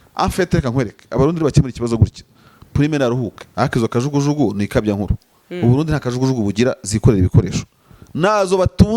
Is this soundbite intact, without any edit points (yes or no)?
no